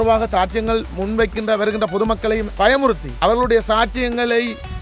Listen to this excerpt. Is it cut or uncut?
cut